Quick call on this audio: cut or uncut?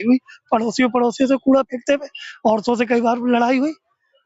uncut